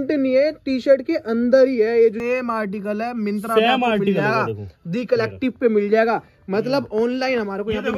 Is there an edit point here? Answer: yes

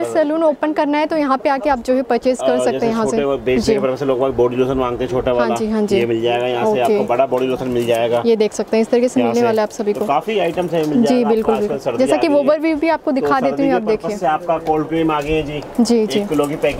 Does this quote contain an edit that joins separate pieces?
no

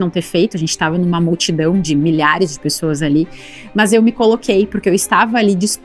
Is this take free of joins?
yes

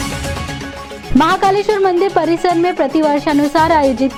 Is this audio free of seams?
yes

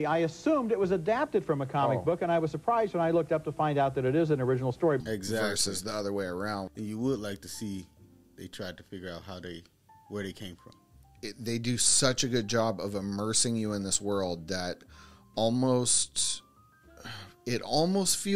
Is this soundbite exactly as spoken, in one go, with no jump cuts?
yes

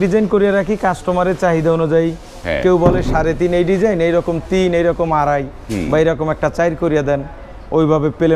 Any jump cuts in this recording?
no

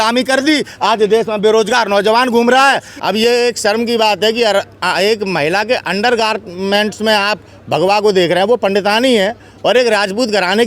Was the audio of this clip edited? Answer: yes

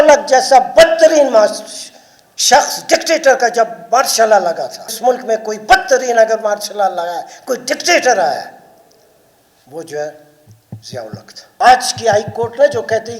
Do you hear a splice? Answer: yes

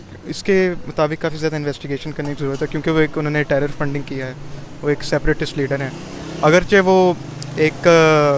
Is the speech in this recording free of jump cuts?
yes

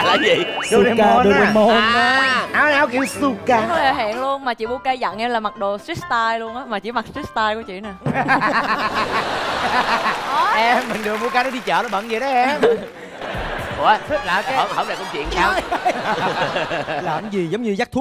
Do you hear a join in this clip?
yes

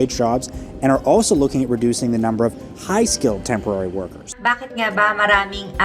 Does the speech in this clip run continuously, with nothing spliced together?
no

